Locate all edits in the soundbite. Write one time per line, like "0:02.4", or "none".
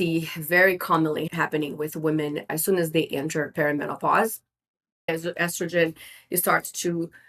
0:01.3
0:05.1